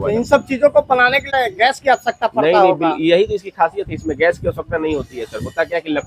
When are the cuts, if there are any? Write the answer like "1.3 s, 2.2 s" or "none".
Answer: 1.3 s